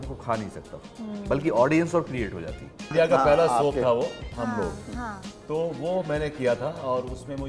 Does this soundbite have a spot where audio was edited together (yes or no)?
yes